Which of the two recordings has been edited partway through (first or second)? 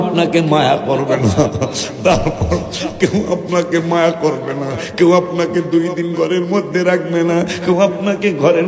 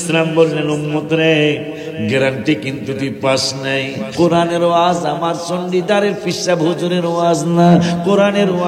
second